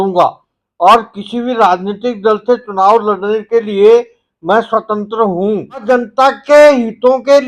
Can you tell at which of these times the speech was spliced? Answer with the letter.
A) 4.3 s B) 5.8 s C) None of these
B